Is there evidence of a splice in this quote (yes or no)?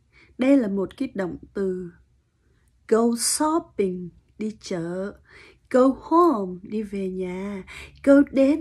no